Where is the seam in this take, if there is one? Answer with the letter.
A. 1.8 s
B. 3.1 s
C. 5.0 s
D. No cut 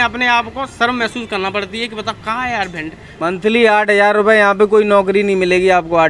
B